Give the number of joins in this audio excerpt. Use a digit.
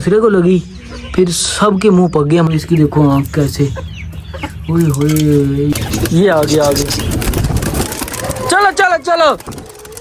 2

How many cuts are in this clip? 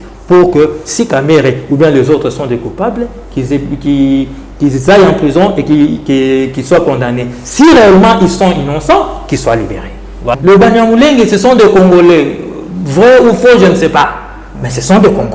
1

